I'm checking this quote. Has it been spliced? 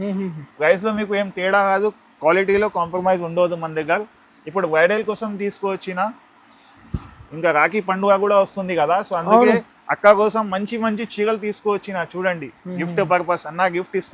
no; 0 cuts

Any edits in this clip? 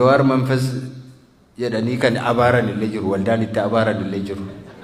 no; 0 cuts

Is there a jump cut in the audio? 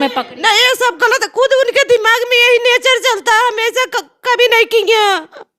no; 0 cuts

